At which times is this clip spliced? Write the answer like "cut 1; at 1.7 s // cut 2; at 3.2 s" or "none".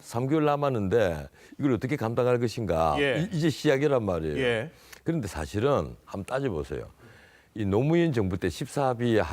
cut 1; at 7.2 s